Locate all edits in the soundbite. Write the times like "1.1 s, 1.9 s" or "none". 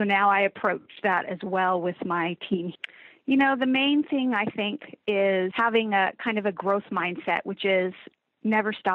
2.7 s, 5.5 s

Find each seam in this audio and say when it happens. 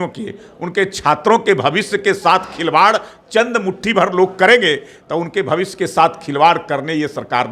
none

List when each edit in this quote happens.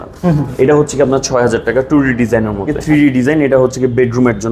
2.8 s

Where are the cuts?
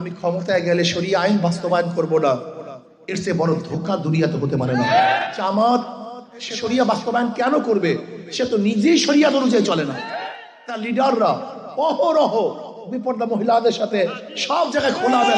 5.2 s, 6.5 s, 10.1 s

